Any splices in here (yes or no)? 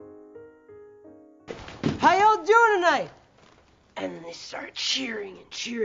yes